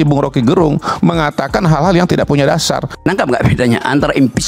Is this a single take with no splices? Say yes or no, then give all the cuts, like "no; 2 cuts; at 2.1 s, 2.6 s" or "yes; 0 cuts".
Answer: no; 1 cut; at 2.9 s